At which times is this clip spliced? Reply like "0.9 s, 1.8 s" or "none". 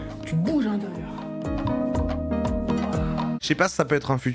3.4 s